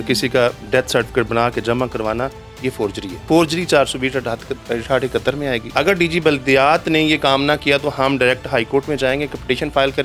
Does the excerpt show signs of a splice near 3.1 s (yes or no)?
yes